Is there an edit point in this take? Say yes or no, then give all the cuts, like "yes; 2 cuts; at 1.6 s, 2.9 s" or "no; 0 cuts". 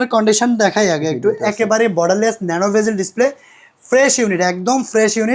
no; 0 cuts